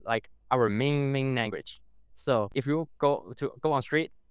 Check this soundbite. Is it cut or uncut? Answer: cut